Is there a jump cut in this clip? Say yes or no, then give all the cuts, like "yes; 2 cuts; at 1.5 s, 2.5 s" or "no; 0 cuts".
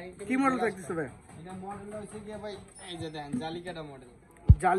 no; 0 cuts